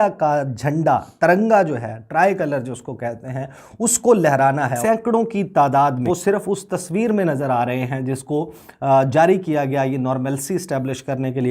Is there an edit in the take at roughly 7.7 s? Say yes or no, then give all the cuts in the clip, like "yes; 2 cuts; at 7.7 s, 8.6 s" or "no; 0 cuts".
no; 2 cuts; at 4.8 s, 6.0 s